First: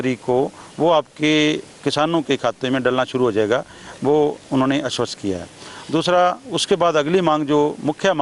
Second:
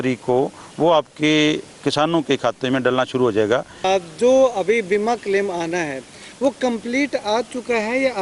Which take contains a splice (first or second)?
second